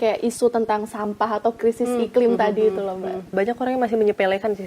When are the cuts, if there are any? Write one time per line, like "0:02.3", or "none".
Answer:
0:03.3